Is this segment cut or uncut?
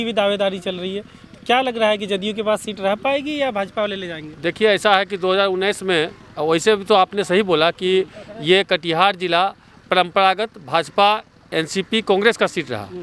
uncut